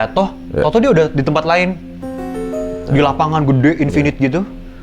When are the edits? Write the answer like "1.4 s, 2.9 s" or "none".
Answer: none